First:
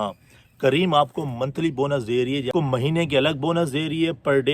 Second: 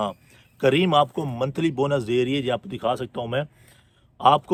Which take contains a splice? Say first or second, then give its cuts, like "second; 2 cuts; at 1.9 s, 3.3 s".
first; 1 cut; at 2.5 s